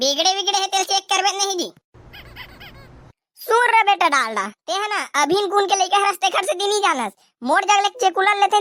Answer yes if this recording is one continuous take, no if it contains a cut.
yes